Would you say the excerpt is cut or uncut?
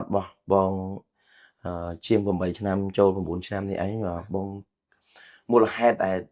uncut